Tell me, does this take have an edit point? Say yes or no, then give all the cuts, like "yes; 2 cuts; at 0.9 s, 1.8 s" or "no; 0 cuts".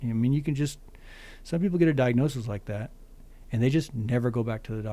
no; 0 cuts